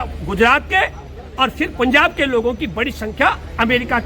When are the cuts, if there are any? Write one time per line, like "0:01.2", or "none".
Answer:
none